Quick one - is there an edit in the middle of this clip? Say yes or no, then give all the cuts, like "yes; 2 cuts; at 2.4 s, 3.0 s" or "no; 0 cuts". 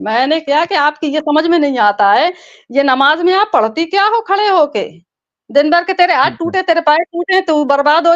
no; 0 cuts